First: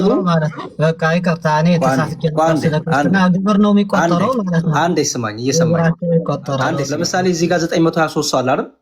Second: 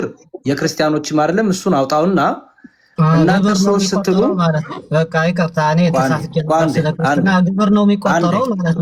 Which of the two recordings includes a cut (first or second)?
first